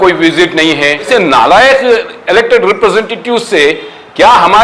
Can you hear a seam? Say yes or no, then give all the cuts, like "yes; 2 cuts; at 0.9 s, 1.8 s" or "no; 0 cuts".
yes; 1 cut; at 1.1 s